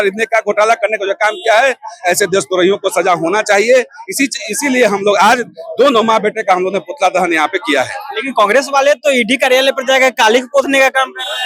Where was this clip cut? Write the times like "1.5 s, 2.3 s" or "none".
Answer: none